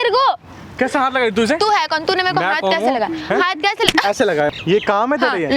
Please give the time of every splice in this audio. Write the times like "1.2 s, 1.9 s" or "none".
4.5 s